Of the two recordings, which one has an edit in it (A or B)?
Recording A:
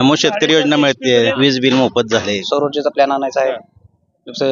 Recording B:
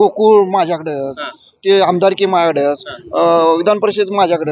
A